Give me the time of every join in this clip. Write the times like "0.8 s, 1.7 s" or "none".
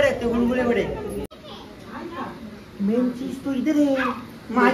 1.3 s

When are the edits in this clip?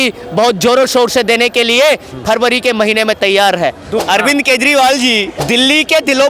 4.0 s, 5.3 s

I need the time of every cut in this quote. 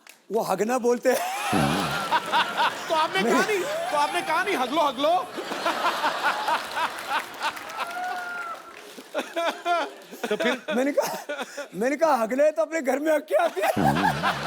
2.0 s

